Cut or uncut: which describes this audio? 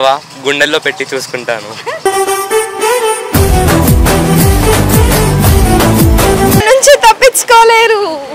cut